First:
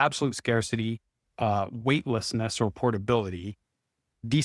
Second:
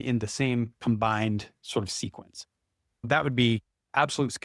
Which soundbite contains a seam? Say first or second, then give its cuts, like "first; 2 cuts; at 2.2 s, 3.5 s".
second; 1 cut; at 3.1 s